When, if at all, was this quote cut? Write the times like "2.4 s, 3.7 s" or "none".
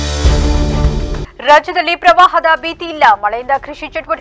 1.2 s